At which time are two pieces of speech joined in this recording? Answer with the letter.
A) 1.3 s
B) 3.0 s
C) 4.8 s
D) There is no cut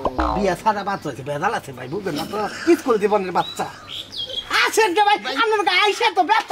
D